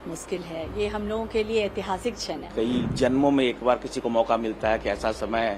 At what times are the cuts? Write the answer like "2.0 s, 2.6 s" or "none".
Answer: 2.5 s